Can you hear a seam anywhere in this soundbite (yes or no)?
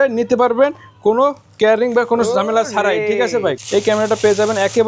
yes